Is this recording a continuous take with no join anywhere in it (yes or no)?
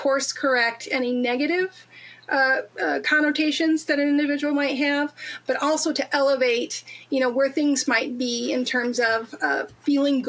yes